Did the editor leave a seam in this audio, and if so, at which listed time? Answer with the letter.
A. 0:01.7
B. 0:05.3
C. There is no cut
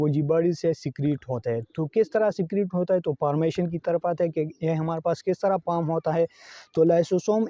C